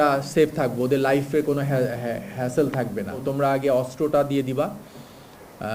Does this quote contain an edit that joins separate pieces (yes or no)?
yes